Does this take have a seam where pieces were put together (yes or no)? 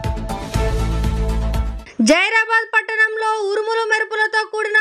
yes